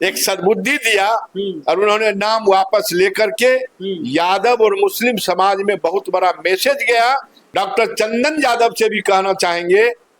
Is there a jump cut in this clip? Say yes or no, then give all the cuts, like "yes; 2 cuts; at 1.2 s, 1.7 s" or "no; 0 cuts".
yes; 1 cut; at 7.4 s